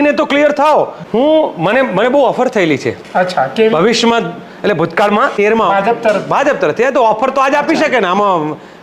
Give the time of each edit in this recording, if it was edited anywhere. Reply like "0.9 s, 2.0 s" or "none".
1.0 s, 5.3 s